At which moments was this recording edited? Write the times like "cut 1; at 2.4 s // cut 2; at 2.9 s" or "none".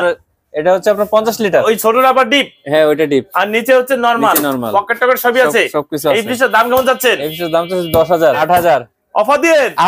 cut 1; at 1.6 s // cut 2; at 8.4 s